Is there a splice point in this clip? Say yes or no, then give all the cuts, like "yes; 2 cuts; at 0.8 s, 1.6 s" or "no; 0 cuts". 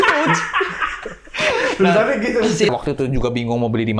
yes; 1 cut; at 2.7 s